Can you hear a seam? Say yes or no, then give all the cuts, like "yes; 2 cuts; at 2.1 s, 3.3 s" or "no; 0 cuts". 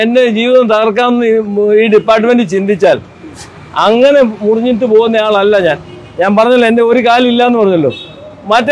no; 0 cuts